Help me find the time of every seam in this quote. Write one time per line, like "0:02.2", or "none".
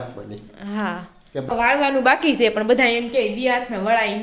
0:01.5